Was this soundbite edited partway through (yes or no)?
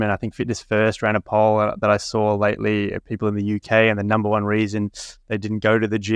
no